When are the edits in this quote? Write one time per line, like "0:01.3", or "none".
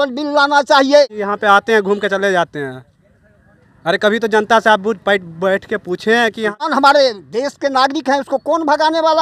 0:01.2
0:06.7

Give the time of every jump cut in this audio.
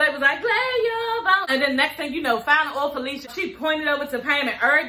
0:01.5
0:03.3

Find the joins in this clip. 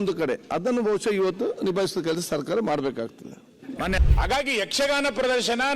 0:04.0

